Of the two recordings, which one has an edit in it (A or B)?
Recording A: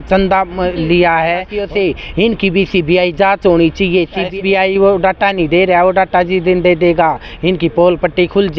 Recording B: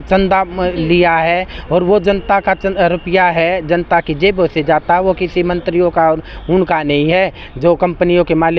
A